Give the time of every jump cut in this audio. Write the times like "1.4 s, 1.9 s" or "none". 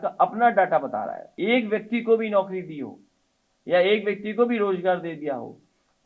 1.2 s